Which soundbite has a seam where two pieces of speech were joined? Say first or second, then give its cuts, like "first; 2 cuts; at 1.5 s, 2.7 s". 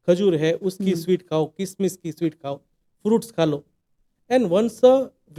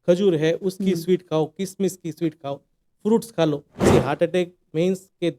second; 1 cut; at 3.7 s